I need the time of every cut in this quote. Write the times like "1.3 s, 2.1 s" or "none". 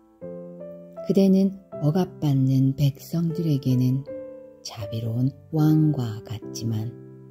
1.1 s